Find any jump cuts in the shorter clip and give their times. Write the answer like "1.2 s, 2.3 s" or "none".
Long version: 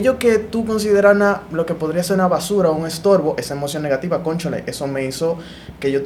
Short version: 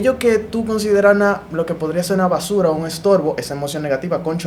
none